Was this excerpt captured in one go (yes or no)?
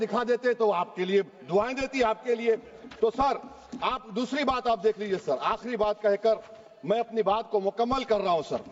yes